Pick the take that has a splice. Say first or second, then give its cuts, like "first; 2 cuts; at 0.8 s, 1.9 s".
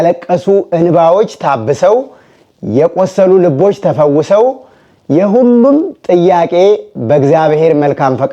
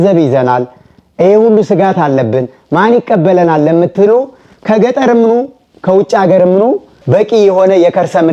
second; 1 cut; at 6.9 s